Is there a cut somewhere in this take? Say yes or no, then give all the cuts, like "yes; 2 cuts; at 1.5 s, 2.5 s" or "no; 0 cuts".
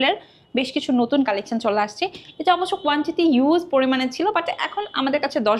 no; 0 cuts